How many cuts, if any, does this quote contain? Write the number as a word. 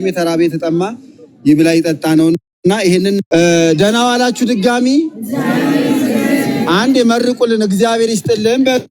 one